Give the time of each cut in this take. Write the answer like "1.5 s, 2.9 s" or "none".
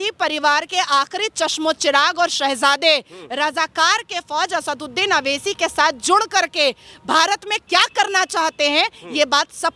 none